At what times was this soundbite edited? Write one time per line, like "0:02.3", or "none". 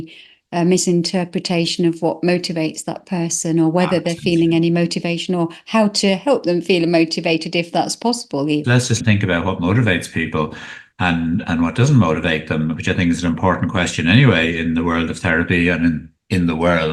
0:09.0
0:10.8